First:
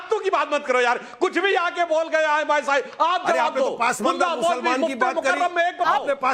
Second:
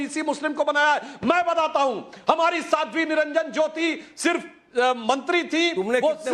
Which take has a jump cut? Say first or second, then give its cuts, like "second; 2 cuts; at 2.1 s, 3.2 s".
second; 1 cut; at 1.1 s